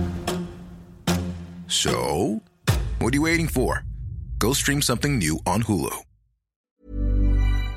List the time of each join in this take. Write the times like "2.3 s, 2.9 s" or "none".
6.6 s

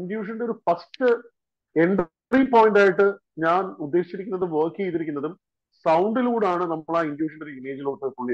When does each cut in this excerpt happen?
none

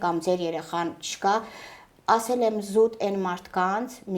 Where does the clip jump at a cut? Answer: none

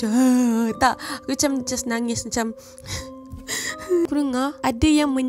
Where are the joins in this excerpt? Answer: 4.0 s

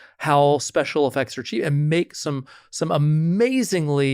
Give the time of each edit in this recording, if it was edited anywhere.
none

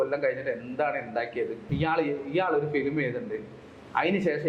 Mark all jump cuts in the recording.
1.7 s

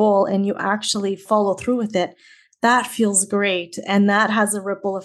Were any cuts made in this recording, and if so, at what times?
1.2 s

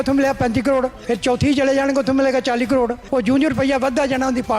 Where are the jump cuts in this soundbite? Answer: 1.0 s, 3.0 s

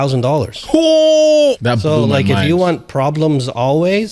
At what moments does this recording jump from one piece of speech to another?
1.7 s

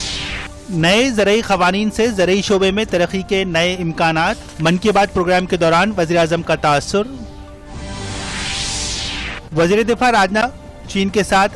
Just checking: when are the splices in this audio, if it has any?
10.4 s

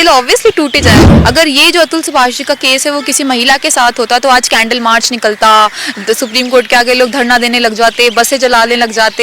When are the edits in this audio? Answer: 1.0 s

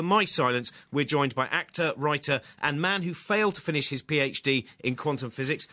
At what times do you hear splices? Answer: 2.4 s

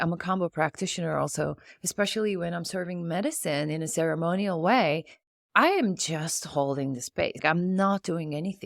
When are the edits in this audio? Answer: 7.4 s

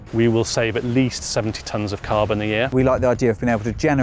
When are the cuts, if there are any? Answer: 2.7 s

